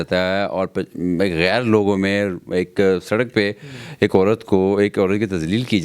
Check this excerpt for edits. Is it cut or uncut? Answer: uncut